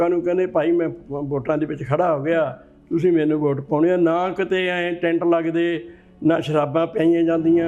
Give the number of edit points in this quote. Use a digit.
0